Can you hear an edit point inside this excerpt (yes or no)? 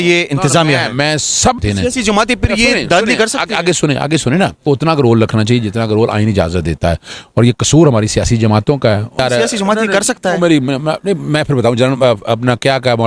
yes